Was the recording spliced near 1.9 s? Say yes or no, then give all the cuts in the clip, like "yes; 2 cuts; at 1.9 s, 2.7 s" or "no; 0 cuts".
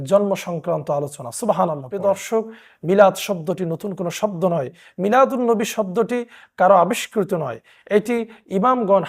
yes; 1 cut; at 1.9 s